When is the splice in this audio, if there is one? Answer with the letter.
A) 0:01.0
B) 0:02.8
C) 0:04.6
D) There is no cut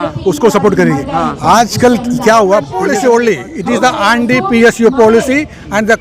B